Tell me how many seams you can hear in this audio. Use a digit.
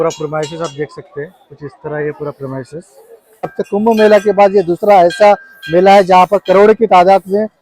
1